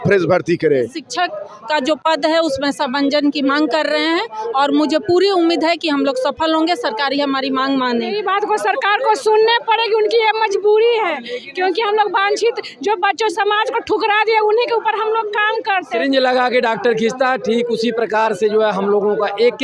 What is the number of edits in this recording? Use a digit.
3